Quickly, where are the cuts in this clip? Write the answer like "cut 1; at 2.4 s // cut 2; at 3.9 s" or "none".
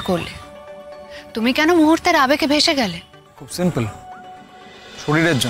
none